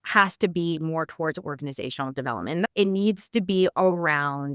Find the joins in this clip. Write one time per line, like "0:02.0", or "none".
0:02.7

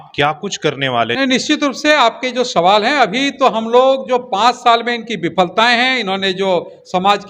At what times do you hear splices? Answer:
0:01.1

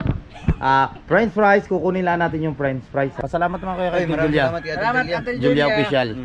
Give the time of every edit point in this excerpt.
0:03.2

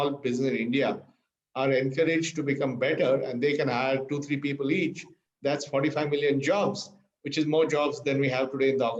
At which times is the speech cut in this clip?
none

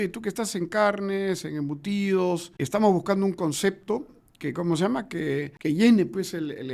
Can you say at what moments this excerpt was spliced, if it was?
0:02.5
0:05.5

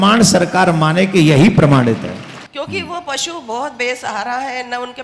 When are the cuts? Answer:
0:02.4

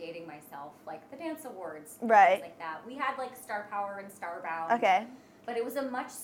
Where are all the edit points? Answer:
none

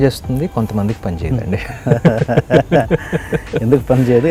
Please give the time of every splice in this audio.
none

